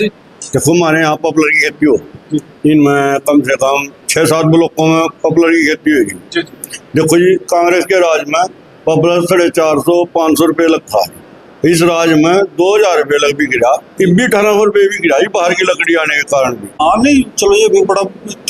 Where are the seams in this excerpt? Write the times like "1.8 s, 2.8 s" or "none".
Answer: 16.6 s